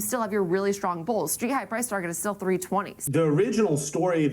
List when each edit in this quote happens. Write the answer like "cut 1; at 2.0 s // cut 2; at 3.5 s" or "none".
cut 1; at 3.0 s